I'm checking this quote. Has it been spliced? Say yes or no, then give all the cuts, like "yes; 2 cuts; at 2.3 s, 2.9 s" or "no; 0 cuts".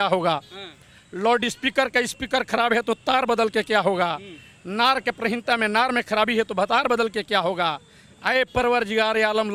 no; 0 cuts